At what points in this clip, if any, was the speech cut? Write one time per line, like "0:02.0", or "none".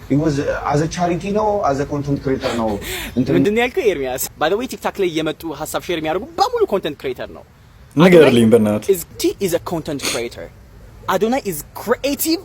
0:04.3
0:09.2